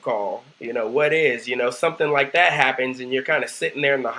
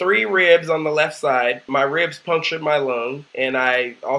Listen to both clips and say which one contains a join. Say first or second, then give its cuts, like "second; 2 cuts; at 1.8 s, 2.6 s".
second; 2 cuts; at 1.6 s, 3.2 s